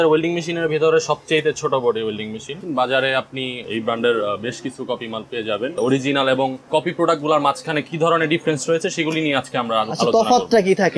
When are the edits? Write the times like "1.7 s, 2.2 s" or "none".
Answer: 2.5 s, 5.8 s